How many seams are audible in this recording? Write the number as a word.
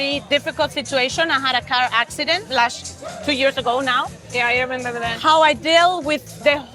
zero